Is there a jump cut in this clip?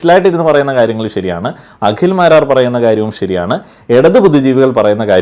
no; 0 cuts

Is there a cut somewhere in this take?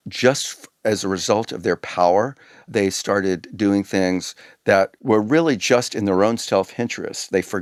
no; 0 cuts

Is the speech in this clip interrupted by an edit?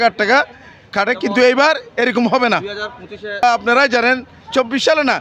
yes; 1 cut; at 3.4 s

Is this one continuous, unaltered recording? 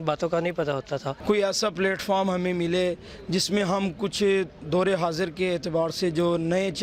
no; 1 cut; at 1.1 s

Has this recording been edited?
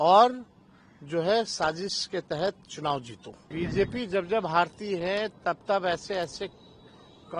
yes; 1 cut; at 3.3 s

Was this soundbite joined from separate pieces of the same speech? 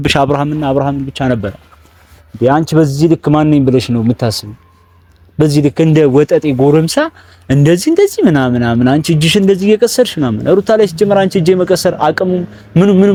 no; 0 cuts

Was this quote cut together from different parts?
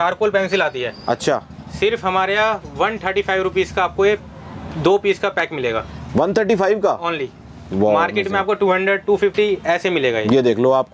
no; 0 cuts

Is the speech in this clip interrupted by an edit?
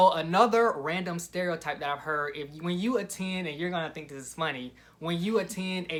no; 0 cuts

